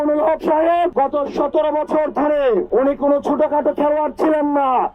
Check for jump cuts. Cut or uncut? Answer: cut